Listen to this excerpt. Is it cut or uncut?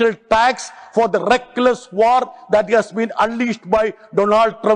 uncut